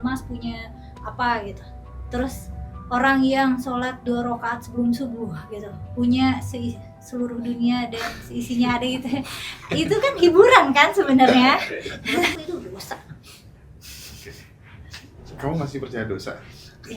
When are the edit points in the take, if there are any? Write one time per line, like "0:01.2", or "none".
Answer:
0:12.3